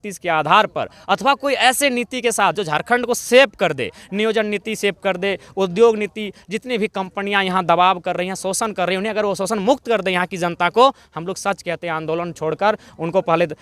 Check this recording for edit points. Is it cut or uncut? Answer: uncut